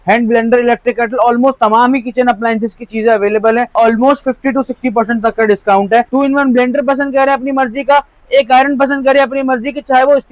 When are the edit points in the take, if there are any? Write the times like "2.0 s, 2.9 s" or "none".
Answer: 3.7 s, 6.1 s